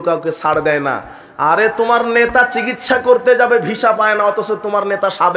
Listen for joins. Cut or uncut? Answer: uncut